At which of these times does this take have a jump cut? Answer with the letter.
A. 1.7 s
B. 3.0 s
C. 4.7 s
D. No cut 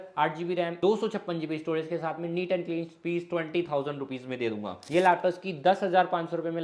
C